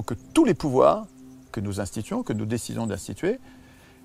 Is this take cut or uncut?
uncut